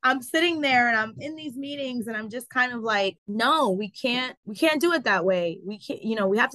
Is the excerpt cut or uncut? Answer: cut